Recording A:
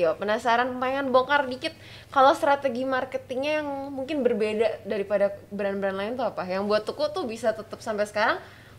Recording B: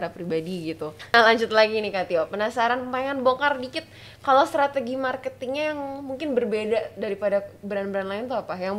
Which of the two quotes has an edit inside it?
B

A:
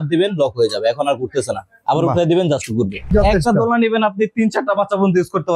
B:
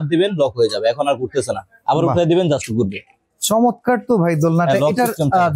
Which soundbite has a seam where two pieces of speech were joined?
A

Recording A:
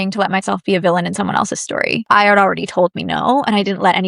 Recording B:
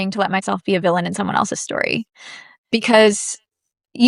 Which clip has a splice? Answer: A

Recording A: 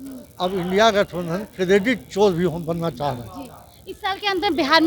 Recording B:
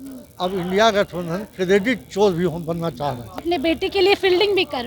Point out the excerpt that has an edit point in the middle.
B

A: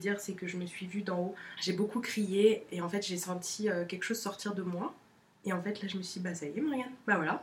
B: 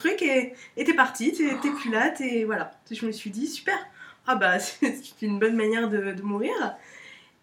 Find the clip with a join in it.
A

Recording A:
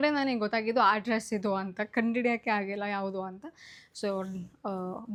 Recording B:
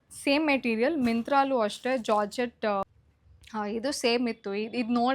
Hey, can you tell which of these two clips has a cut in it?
B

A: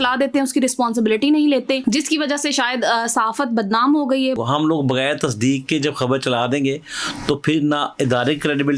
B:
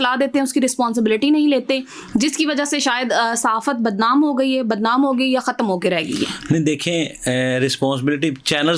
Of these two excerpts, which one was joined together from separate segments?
A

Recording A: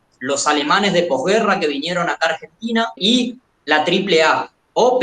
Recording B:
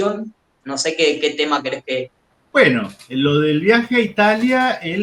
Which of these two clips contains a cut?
A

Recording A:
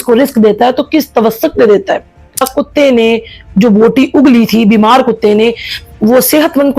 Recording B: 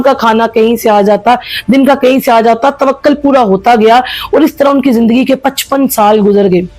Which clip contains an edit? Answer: A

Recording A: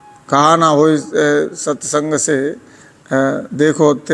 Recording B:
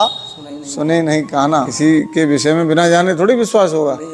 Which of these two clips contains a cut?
B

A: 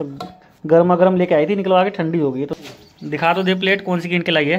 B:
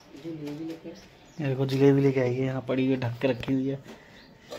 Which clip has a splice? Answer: A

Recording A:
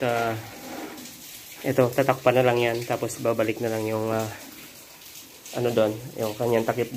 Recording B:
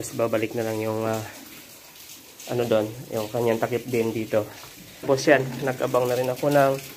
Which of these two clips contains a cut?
B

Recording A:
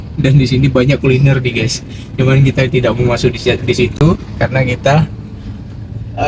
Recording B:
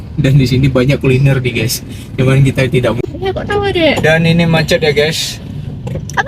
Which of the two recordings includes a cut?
B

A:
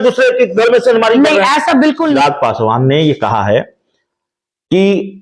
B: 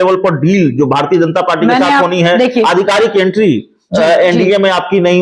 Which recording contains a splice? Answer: A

